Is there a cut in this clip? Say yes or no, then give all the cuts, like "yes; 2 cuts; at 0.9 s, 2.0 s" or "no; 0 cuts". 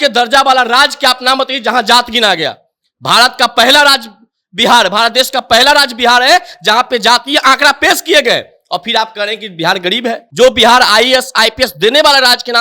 yes; 1 cut; at 10.2 s